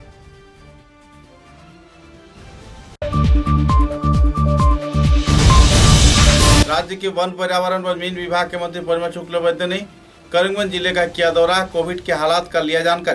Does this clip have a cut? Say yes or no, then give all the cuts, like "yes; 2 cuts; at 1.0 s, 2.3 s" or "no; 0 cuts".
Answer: yes; 1 cut; at 6.6 s